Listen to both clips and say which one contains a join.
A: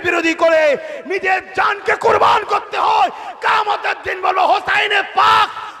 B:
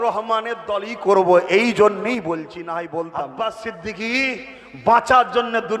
B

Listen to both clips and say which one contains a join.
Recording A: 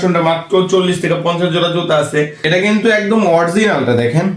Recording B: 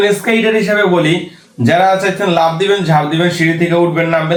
A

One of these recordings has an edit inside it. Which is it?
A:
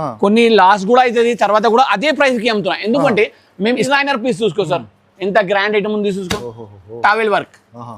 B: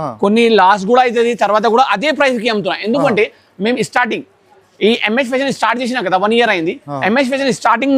A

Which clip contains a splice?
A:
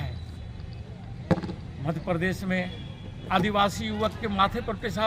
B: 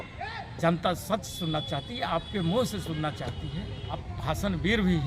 B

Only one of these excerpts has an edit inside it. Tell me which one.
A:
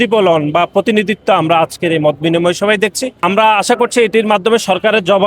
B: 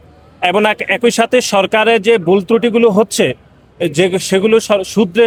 A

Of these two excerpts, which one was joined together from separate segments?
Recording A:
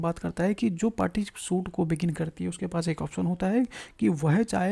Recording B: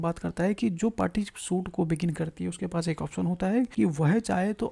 B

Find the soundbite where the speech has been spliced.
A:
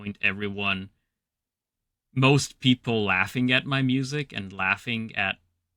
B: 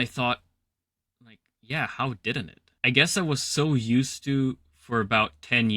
B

